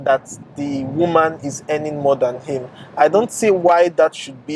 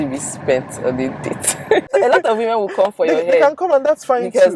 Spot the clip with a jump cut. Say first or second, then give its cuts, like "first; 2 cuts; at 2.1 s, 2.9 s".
second; 1 cut; at 1.9 s